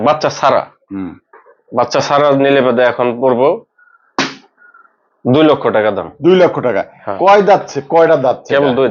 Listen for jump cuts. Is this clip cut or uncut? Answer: uncut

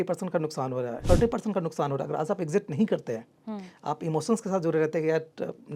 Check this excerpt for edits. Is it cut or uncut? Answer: cut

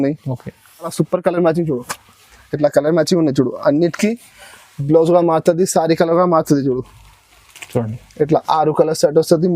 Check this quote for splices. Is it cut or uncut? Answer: cut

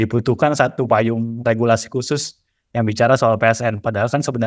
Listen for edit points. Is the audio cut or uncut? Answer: uncut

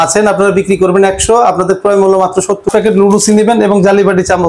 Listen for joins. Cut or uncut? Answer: cut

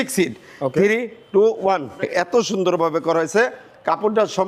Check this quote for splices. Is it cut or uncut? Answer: cut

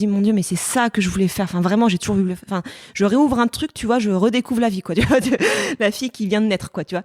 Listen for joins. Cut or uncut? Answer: uncut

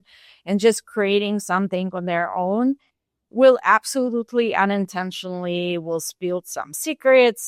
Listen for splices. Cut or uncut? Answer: uncut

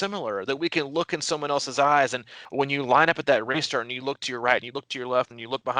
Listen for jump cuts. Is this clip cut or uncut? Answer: cut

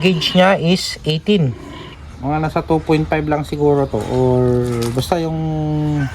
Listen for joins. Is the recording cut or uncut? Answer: cut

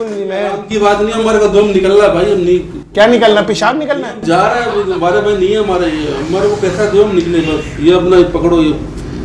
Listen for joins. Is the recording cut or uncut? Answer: uncut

